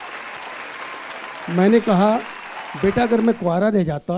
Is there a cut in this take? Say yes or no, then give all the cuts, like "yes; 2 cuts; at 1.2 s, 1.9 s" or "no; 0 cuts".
yes; 1 cut; at 1.5 s